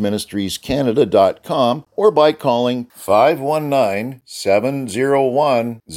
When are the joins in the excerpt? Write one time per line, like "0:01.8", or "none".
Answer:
0:01.9